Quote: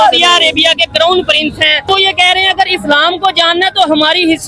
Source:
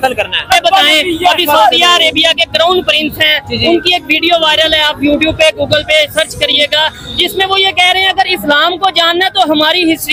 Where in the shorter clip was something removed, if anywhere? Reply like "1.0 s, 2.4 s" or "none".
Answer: 1.9 s